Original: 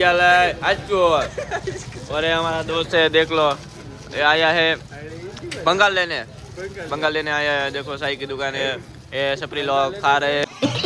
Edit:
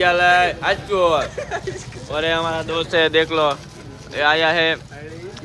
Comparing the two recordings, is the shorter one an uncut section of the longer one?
yes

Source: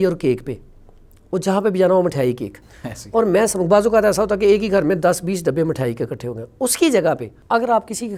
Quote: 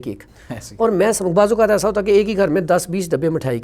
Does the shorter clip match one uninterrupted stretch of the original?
yes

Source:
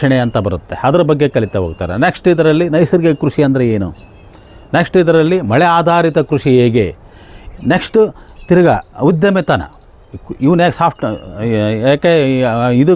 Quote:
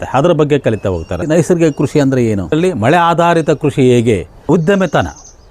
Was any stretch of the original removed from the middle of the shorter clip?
yes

